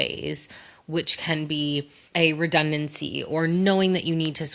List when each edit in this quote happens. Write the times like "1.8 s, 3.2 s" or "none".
2.0 s